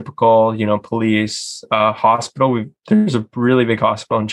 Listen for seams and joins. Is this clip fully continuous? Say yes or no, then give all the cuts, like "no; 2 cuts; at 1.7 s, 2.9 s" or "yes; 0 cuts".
yes; 0 cuts